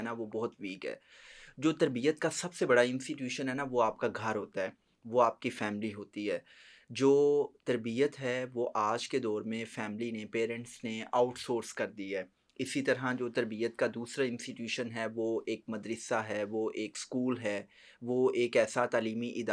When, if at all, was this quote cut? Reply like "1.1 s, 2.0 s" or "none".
none